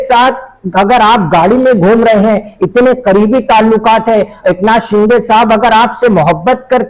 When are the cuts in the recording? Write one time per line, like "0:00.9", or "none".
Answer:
none